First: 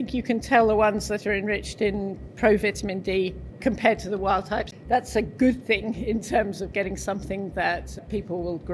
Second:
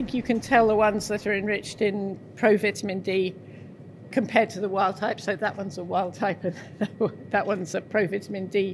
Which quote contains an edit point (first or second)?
first